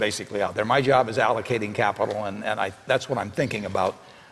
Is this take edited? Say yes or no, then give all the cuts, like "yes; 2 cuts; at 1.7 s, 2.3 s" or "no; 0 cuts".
yes; 1 cut; at 2.0 s